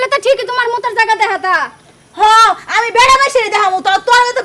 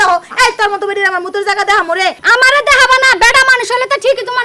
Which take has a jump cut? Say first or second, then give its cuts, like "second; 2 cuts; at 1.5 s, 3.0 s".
second; 1 cut; at 2.2 s